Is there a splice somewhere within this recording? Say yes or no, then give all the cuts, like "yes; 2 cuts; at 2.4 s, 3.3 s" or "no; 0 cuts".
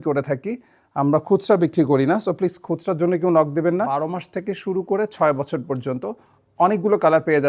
yes; 1 cut; at 4.1 s